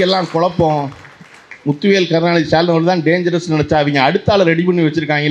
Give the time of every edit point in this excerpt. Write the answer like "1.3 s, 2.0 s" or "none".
none